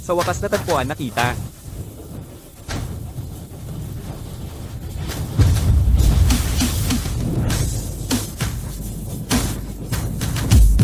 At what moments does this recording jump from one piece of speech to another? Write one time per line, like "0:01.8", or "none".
none